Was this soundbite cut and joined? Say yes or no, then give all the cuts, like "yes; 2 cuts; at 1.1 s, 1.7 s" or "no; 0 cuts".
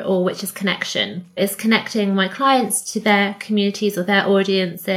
yes; 1 cut; at 1.4 s